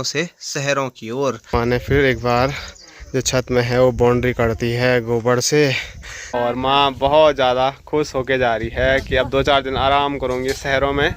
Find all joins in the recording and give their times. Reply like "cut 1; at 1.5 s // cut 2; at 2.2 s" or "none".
cut 1; at 1.5 s // cut 2; at 6.3 s